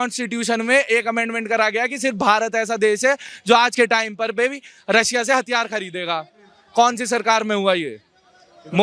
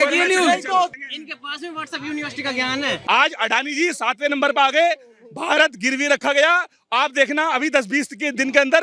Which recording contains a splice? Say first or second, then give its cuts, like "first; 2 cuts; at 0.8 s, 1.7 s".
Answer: second; 2 cuts; at 0.9 s, 3.0 s